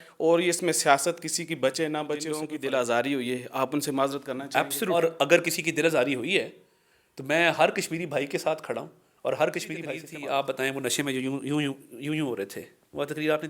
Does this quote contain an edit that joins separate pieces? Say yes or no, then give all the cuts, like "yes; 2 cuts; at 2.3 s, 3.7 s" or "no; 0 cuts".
yes; 3 cuts; at 2.5 s, 5.0 s, 10.0 s